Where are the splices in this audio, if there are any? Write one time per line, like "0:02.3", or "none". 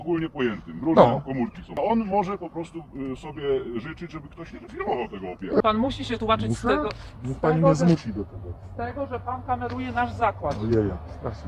0:01.8
0:05.6